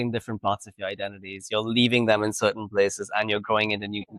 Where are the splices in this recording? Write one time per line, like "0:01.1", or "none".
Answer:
none